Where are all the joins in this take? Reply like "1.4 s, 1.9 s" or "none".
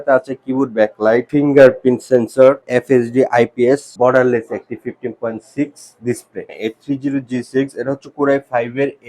1.3 s, 2.6 s, 3.9 s, 6.5 s

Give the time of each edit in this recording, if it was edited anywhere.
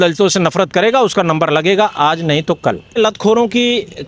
3.0 s

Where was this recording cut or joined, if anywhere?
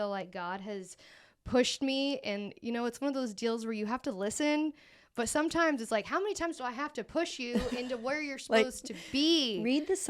none

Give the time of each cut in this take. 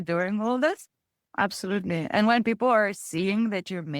1.2 s

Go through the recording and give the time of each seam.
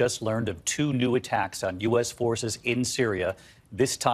none

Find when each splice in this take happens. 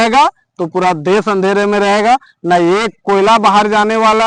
none

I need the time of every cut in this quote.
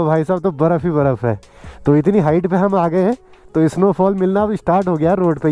none

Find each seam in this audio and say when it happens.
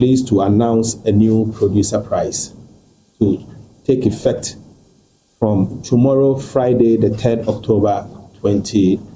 none

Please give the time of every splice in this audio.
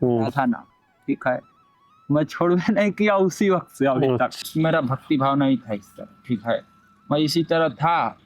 4.4 s

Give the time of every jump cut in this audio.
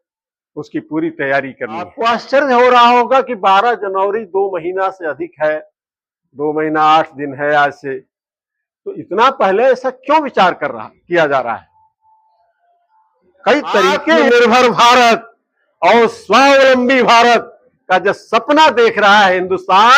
1.9 s, 14.2 s

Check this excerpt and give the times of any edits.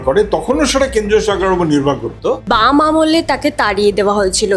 2.4 s

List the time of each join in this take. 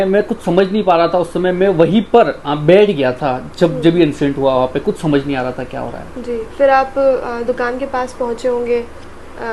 none

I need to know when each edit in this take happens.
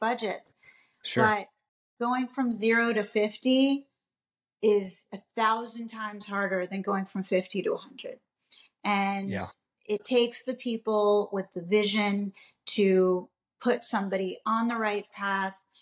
none

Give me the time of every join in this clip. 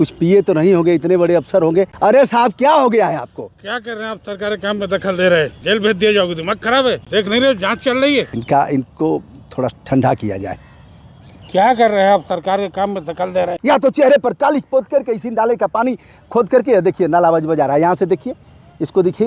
1.9 s, 5.6 s, 7.0 s, 8.4 s, 13.6 s

